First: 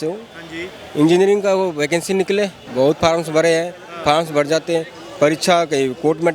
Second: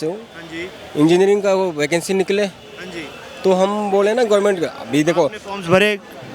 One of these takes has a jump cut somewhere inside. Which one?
first; 1 cut; at 2.6 s

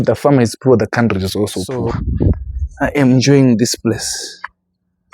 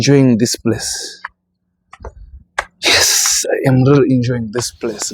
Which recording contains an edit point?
first; 1 cut; at 2.0 s

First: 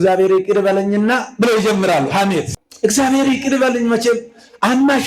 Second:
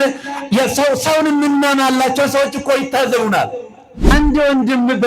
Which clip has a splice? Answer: second; 1 cut; at 4.1 s

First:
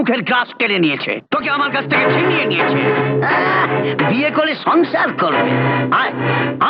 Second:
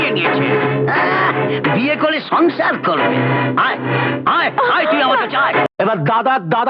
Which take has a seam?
second; 1 cut; at 5.6 s

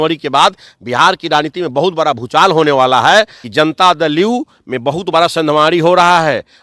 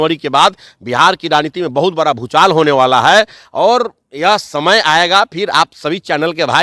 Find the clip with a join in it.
first; 1 cut; at 3.4 s

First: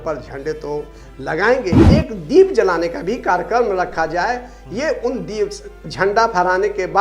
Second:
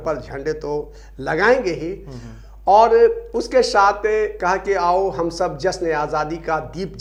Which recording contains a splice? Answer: first; 1 cut; at 1.8 s

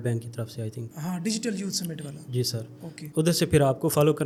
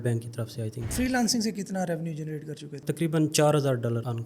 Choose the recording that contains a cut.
second; 1 cut; at 0.9 s

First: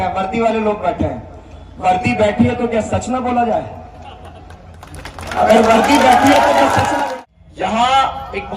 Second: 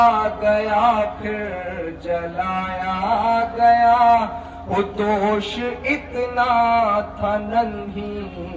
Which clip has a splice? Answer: first; 1 cut; at 7.1 s

